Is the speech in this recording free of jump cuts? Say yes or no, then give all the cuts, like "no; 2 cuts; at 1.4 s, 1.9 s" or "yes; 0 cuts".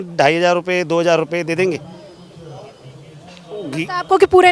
yes; 0 cuts